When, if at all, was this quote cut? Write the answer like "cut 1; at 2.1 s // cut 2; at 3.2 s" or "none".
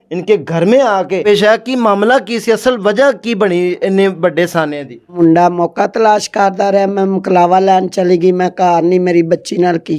cut 1; at 1.2 s // cut 2; at 5.1 s